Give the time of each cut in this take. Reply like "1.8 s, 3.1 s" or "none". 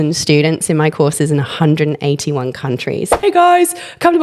3.2 s